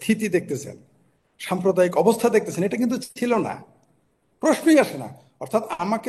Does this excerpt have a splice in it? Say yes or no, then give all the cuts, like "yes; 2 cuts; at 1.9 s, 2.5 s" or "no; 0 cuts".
no; 0 cuts